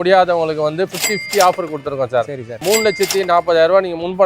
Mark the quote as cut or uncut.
uncut